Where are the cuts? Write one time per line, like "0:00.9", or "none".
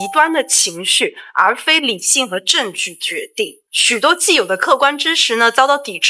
none